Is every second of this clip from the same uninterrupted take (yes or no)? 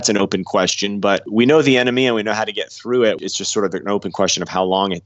no